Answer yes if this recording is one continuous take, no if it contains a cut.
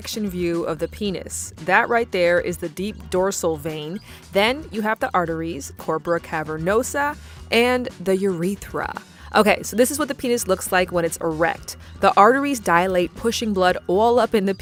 yes